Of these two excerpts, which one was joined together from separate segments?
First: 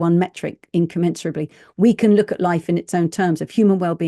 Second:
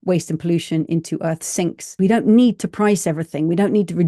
second; 1 cut; at 1.9 s

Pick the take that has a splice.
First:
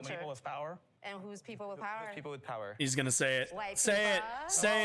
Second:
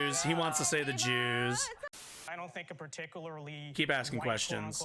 second; 1 cut; at 2.1 s

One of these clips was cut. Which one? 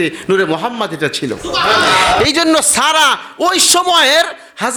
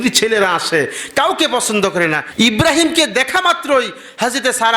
second; 1 cut; at 2.2 s

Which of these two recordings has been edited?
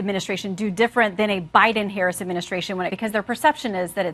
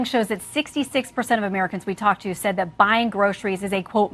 first; 1 cut; at 2.9 s

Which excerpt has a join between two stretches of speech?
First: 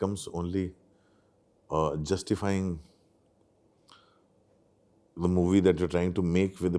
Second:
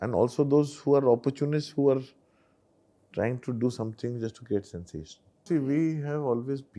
second; 1 cut; at 5.4 s

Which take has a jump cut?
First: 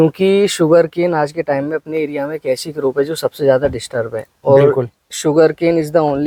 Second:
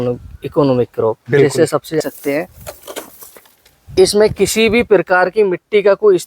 second; 1 cut; at 2.0 s

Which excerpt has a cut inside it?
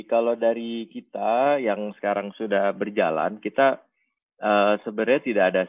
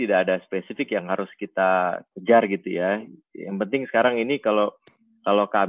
second; 1 cut; at 2.1 s

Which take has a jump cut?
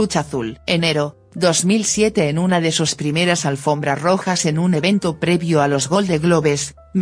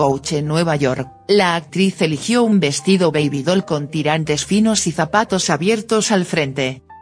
second; 1 cut; at 2.1 s

